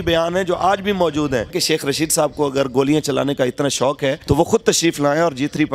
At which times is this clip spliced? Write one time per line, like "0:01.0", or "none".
0:01.6
0:04.2